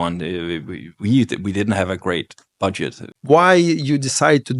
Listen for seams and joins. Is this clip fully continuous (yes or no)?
no